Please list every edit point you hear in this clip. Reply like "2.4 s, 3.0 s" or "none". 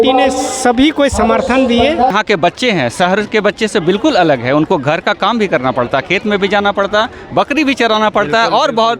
2.1 s